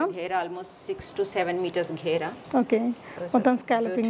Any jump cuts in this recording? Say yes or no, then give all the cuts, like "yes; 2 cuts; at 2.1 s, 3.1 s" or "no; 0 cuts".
no; 0 cuts